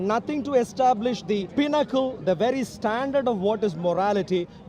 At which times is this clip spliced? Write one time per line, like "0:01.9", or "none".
0:01.5

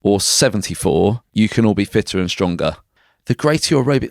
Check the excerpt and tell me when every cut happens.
0:01.2
0:02.8

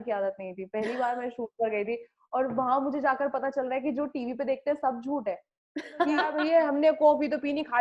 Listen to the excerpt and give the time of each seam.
0:06.3

